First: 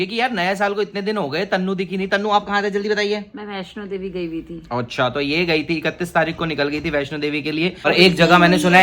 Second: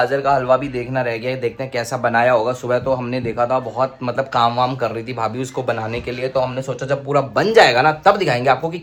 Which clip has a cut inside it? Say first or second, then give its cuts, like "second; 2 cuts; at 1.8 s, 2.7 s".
first; 1 cut; at 7.9 s